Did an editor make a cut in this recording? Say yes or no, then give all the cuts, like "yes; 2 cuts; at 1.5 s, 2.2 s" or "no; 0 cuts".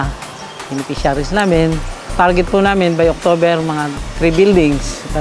no; 0 cuts